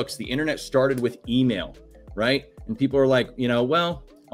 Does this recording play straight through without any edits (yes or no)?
yes